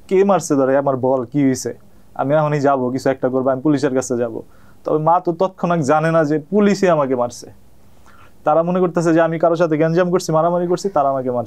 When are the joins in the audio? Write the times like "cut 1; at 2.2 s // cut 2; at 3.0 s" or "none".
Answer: none